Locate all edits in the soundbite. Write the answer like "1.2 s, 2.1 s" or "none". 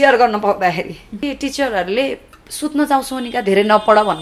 1.2 s